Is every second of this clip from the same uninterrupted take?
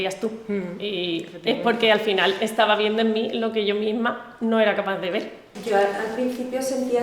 no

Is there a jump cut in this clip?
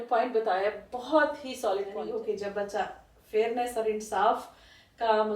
yes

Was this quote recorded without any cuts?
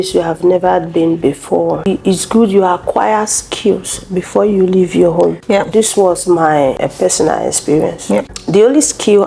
no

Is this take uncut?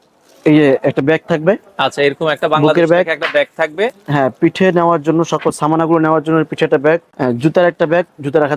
no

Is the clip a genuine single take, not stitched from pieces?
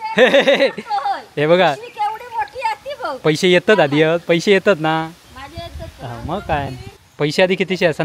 yes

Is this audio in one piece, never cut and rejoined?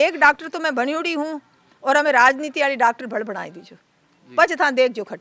yes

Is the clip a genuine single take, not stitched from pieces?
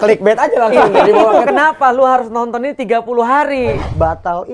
no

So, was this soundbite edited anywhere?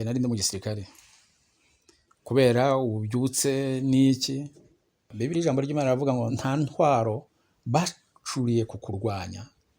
yes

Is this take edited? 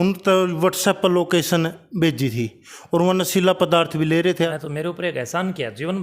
yes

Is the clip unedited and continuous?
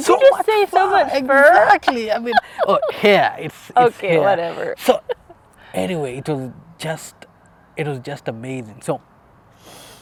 yes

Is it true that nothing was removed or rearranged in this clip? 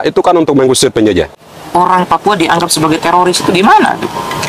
no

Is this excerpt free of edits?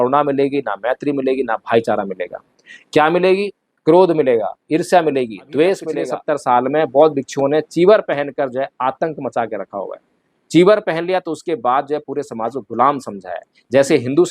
no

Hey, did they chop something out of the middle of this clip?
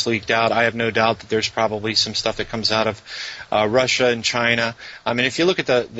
no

